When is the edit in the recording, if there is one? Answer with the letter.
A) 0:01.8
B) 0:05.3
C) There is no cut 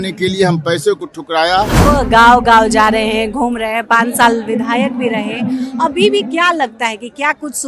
A